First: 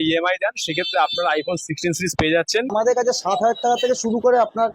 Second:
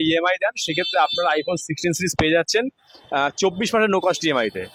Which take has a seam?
first; 1 cut; at 2.7 s

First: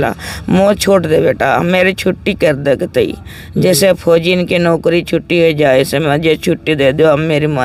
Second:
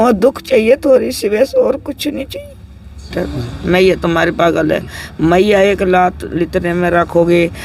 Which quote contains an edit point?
second; 1 cut; at 3.1 s

